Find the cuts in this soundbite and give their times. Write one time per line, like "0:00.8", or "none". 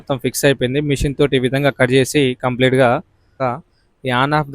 0:03.3